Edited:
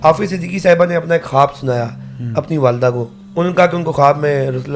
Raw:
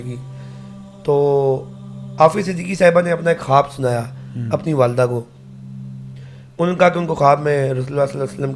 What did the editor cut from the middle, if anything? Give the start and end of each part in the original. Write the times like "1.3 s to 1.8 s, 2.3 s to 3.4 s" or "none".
5.3 s to 6.4 s